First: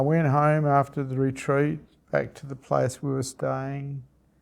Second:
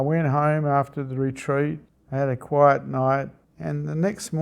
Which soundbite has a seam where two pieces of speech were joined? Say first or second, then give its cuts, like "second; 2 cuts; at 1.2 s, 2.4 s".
second; 2 cuts; at 1.9 s, 3.4 s